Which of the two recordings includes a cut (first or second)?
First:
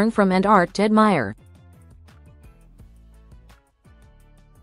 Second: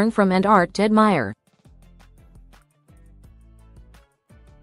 first